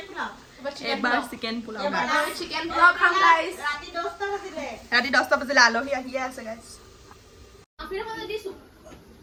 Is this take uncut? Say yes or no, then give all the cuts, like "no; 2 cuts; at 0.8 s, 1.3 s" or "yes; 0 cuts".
yes; 0 cuts